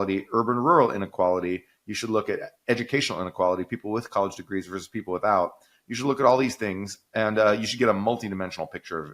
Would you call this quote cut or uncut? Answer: uncut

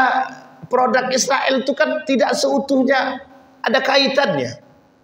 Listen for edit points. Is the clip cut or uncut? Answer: uncut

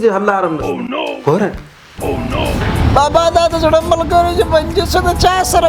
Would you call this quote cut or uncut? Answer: cut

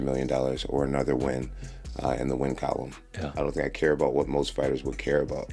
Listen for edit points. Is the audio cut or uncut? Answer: cut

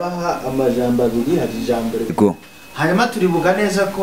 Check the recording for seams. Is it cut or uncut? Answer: cut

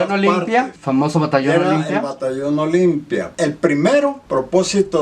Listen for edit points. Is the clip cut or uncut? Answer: cut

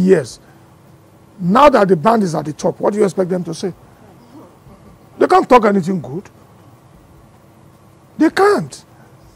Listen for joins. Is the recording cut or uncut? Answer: uncut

